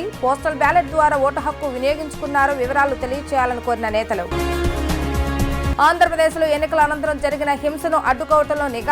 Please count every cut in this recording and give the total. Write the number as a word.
zero